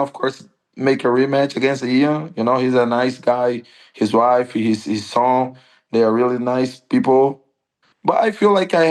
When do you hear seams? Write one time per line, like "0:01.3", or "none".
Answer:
none